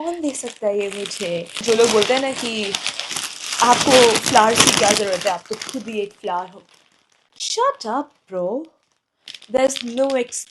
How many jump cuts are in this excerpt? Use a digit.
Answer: 1